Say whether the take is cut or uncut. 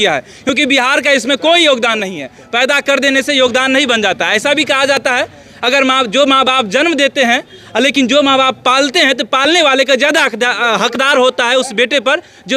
uncut